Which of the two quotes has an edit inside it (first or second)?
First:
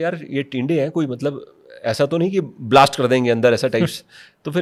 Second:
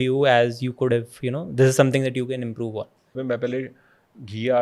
second